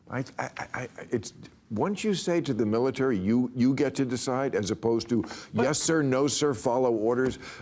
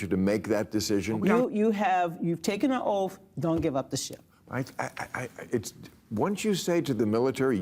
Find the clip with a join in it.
second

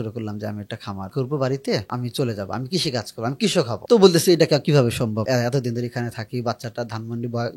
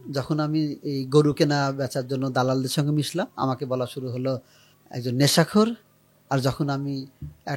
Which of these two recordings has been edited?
first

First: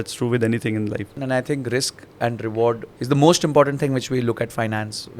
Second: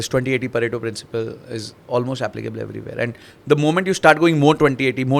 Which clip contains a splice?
first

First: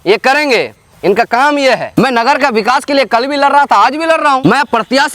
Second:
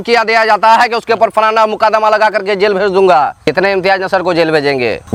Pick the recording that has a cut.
first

